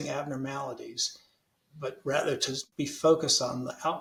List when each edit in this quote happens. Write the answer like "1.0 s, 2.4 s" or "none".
none